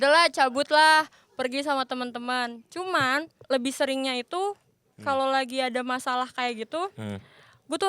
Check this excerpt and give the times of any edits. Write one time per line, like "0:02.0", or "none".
0:03.4